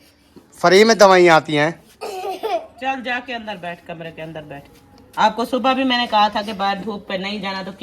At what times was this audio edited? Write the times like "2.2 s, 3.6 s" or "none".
none